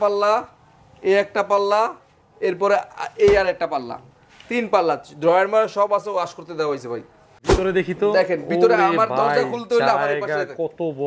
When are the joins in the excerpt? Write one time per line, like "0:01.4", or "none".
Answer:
0:07.4